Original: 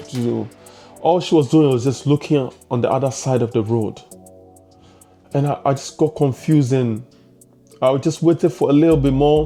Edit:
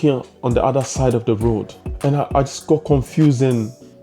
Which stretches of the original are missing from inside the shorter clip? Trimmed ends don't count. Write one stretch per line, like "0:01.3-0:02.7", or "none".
0:04.1-0:05.1